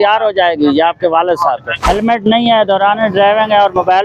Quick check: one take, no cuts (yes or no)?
no